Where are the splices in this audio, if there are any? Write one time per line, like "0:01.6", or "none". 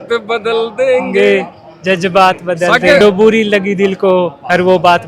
0:03.0